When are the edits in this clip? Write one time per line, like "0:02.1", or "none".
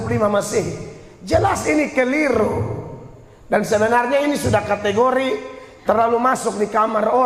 none